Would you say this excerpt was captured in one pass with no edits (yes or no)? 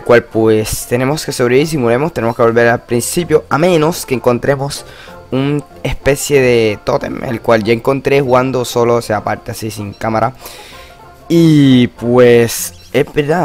no